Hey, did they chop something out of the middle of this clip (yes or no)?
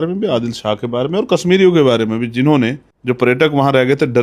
yes